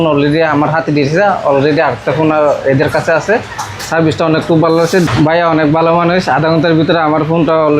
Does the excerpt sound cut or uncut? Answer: cut